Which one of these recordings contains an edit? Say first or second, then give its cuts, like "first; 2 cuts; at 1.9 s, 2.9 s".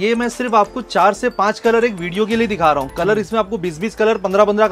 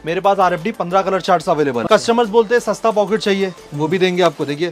second; 1 cut; at 1.8 s